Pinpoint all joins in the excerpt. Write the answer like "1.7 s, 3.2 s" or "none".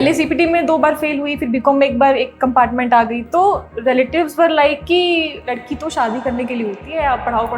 none